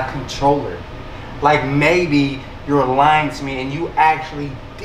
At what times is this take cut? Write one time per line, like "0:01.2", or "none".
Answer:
none